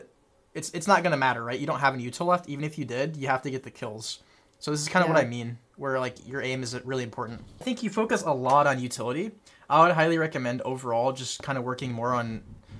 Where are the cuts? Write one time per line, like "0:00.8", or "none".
0:07.6